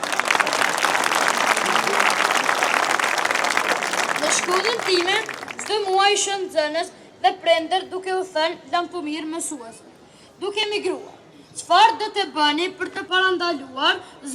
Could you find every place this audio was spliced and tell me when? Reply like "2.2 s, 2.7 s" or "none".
13.0 s